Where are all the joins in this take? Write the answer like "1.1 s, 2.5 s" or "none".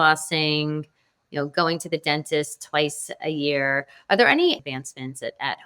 4.6 s